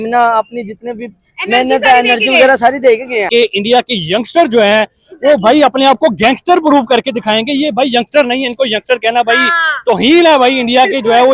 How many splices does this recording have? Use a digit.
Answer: 1